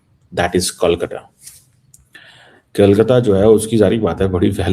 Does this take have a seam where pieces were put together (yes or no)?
no